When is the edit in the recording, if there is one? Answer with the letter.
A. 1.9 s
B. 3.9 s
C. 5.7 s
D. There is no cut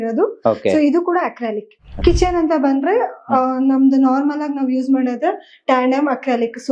A